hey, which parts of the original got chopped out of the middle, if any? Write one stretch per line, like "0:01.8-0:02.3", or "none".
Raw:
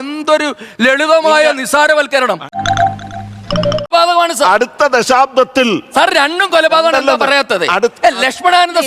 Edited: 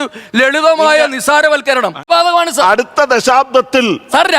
0:02.5-0:03.8